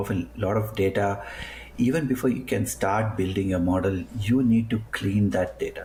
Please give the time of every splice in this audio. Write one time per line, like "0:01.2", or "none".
none